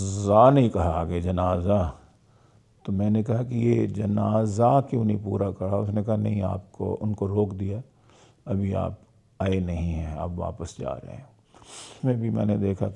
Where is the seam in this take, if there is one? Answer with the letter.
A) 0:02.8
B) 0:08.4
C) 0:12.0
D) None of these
C